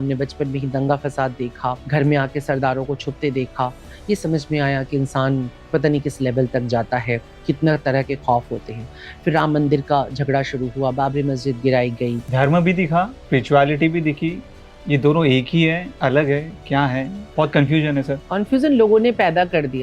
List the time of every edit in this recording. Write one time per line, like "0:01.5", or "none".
0:01.8
0:12.2
0:13.2
0:17.2
0:18.2